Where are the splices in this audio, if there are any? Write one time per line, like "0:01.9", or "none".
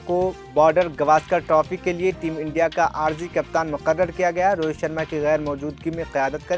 none

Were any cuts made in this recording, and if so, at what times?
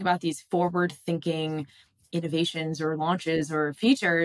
none

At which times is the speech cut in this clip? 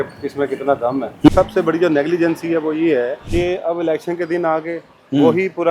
0:01.3
0:03.2

